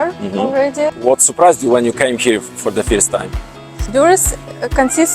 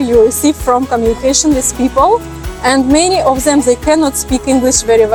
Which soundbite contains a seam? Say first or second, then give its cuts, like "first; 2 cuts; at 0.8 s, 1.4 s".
first; 2 cuts; at 1.0 s, 3.7 s